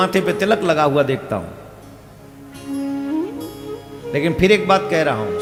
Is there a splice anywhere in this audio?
no; 0 cuts

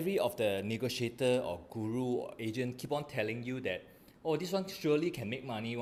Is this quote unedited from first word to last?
yes; 0 cuts

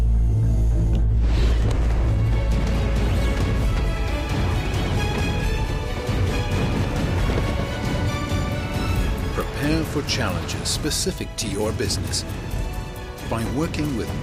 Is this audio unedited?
yes; 0 cuts

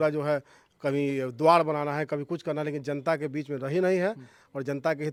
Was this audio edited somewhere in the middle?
no; 0 cuts

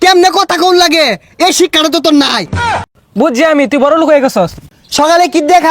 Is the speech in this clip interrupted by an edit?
yes; 2 cuts; at 2.8 s, 4.6 s

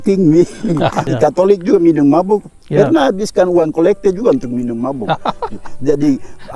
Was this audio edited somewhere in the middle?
yes; 1 cut; at 1.1 s

